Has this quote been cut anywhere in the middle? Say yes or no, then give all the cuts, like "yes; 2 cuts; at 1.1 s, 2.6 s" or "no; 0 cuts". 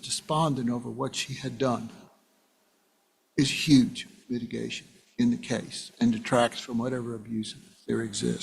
no; 0 cuts